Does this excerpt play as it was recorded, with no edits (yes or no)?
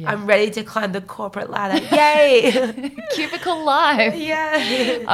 yes